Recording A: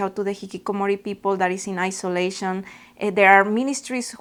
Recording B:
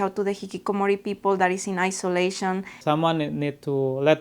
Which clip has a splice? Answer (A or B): B